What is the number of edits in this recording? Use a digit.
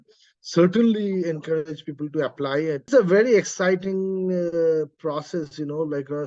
1